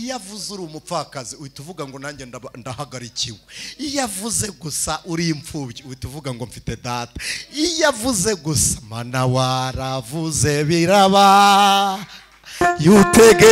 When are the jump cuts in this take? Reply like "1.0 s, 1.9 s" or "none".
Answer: none